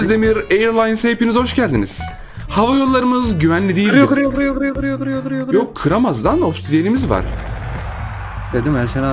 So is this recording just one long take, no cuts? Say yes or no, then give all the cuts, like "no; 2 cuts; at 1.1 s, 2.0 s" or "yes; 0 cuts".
yes; 0 cuts